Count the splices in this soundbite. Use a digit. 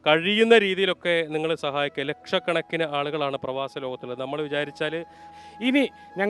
1